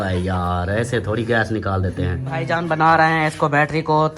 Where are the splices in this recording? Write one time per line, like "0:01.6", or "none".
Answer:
0:02.5